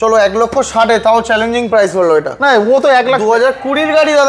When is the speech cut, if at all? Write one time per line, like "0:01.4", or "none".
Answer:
none